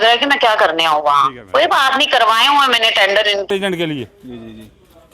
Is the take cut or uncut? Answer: cut